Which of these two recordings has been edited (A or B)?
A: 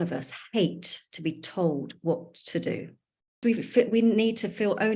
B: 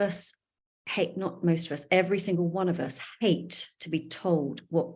A